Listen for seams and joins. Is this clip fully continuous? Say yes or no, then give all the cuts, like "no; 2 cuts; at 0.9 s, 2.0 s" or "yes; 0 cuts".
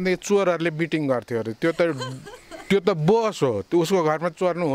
yes; 0 cuts